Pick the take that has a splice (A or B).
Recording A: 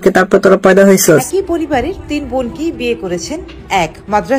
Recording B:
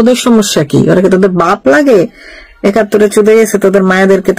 A